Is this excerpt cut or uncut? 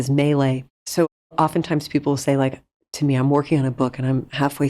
uncut